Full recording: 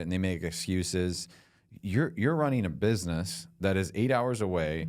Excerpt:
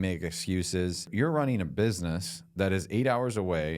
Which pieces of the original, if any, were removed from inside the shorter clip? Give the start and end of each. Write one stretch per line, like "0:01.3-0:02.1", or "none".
0:01.3-0:02.1